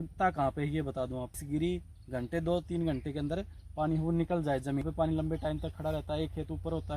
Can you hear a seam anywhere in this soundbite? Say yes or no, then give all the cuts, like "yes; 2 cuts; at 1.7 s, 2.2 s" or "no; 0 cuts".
yes; 2 cuts; at 1.4 s, 4.8 s